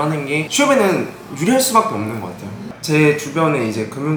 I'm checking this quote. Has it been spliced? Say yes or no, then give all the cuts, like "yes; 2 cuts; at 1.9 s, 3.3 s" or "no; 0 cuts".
no; 0 cuts